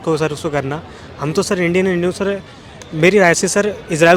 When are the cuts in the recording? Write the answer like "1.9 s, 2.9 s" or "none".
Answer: none